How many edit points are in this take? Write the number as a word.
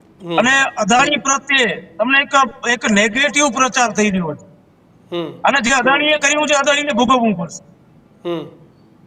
zero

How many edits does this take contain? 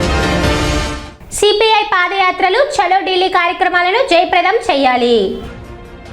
one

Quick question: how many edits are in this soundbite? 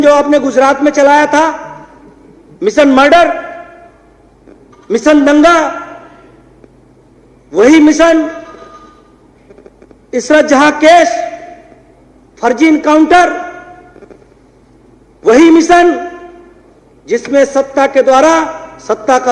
zero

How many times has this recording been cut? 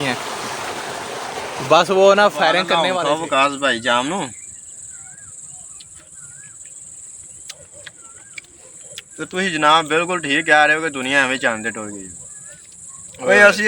one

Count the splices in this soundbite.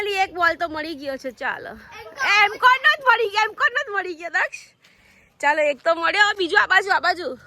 zero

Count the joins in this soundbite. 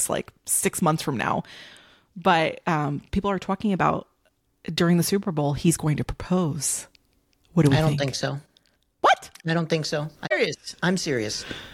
one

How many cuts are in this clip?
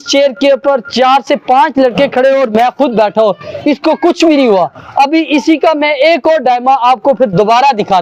zero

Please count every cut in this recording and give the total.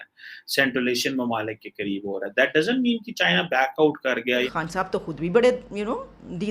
one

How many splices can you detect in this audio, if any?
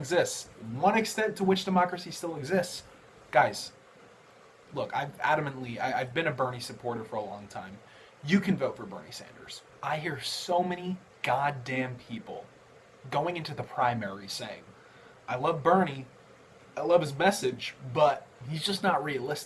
one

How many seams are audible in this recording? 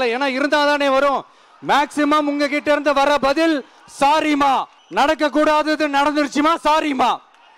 one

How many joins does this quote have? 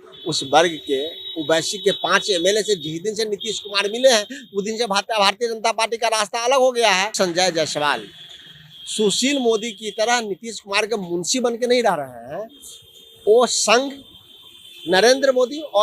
one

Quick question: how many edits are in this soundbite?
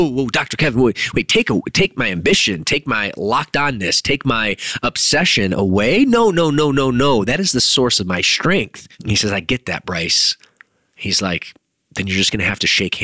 one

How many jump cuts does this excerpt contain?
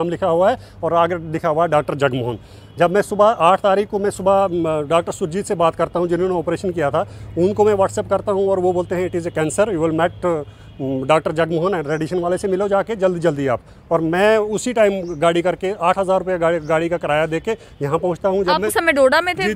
zero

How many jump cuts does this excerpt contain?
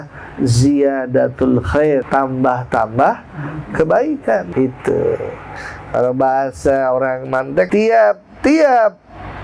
three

